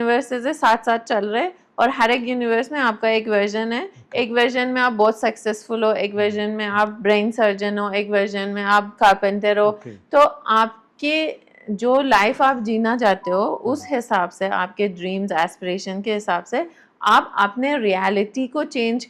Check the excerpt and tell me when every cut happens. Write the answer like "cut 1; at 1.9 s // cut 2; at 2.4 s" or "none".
none